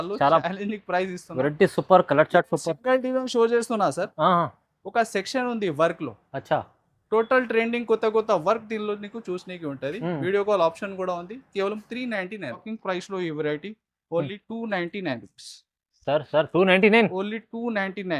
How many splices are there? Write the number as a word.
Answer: one